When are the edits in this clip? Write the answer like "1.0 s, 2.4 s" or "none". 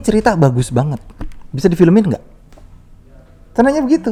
none